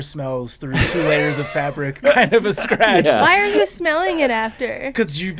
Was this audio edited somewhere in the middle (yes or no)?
no